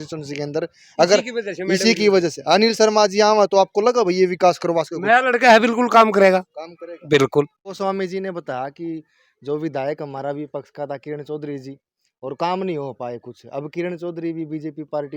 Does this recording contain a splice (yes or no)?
yes